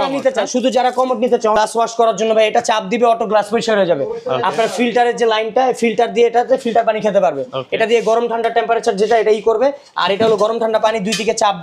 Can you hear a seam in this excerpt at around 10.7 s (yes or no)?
no